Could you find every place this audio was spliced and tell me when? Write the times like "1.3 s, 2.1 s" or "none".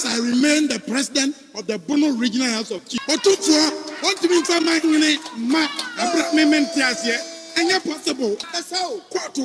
2.9 s, 8.6 s